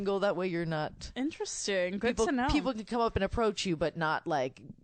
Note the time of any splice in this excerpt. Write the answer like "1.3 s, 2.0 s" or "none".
1.0 s